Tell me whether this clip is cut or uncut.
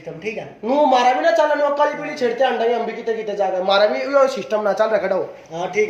uncut